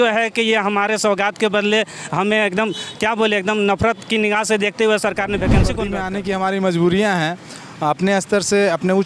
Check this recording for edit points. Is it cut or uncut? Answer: cut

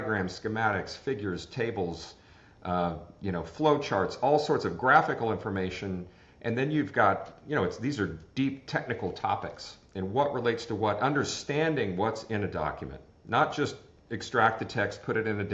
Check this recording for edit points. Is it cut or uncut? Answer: uncut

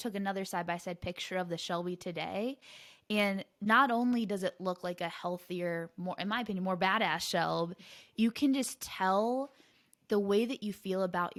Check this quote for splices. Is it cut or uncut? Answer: uncut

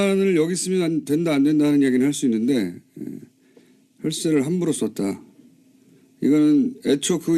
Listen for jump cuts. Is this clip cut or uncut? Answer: uncut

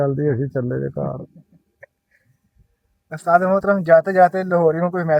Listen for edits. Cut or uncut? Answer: uncut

